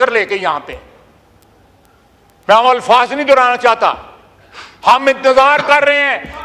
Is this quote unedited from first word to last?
yes; 0 cuts

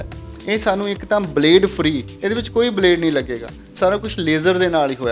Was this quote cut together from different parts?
yes; 1 cut; at 2.1 s

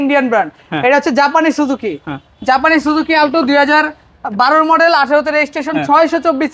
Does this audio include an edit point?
no; 0 cuts

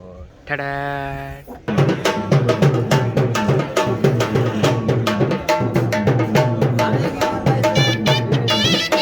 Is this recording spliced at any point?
yes; 1 cut; at 1.7 s

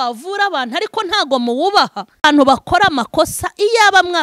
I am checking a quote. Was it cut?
no; 0 cuts

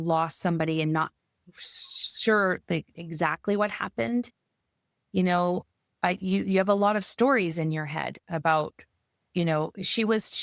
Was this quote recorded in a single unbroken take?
yes; 0 cuts

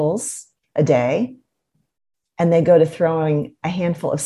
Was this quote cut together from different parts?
no; 0 cuts

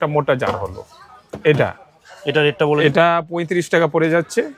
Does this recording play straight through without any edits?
yes; 0 cuts

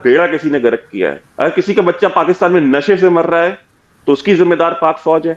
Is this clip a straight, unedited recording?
no; 1 cut; at 1.2 s

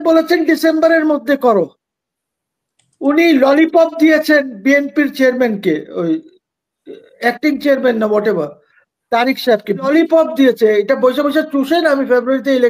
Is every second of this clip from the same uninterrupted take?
no; 1 cut; at 9.9 s

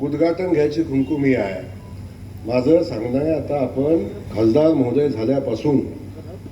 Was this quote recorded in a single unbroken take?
no; 1 cut; at 4.2 s

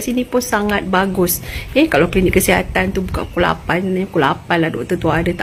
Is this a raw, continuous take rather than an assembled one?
yes; 0 cuts

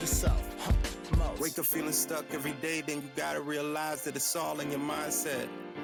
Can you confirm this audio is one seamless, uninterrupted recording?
yes; 0 cuts

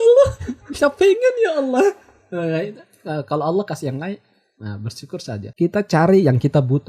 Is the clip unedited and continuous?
yes; 0 cuts

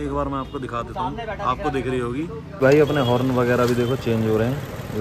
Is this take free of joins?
no; 1 cut; at 2.5 s

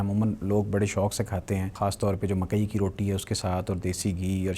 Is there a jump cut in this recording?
yes; 1 cut; at 1.7 s

